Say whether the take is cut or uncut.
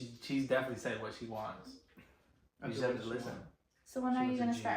uncut